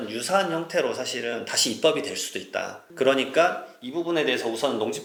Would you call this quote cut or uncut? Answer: uncut